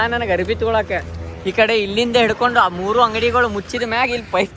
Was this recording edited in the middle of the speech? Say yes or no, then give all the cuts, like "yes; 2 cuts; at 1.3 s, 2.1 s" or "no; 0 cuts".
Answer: no; 0 cuts